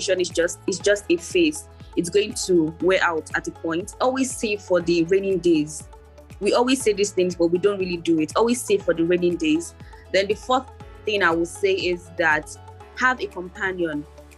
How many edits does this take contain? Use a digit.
1